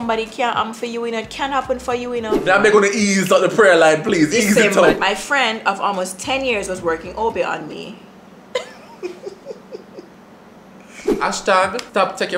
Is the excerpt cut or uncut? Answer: cut